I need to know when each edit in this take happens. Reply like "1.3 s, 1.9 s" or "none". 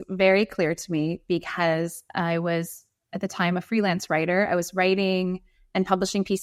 none

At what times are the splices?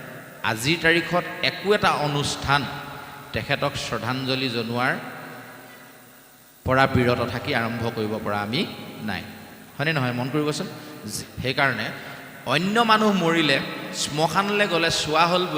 11.1 s

